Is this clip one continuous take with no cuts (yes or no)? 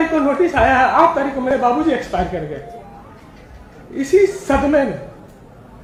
yes